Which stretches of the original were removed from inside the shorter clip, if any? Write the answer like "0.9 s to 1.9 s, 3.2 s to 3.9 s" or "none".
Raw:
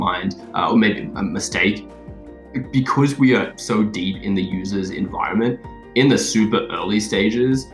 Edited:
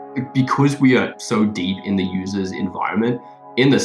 none

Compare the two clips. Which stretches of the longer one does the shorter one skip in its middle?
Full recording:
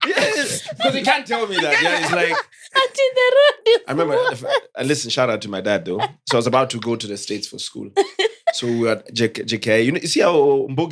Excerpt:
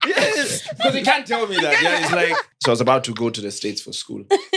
2.5 s to 6.2 s

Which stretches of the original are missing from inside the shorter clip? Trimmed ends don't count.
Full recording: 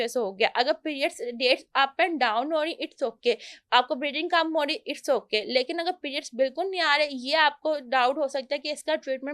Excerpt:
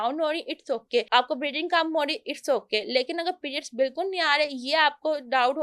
3.4 s to 3.7 s

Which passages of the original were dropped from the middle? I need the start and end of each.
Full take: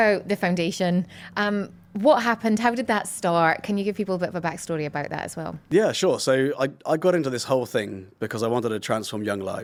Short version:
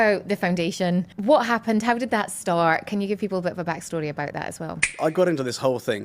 1.1 s to 1.9 s, 5.6 s to 6.7 s

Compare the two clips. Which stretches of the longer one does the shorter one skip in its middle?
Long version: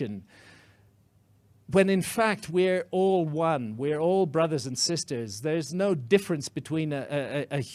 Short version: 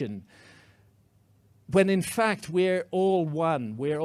none

